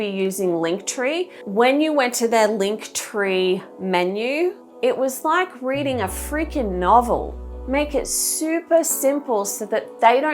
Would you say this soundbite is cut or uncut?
cut